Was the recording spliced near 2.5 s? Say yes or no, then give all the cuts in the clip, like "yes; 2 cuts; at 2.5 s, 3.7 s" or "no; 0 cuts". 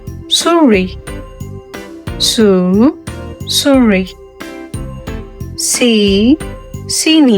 no; 2 cuts; at 4.1 s, 5.6 s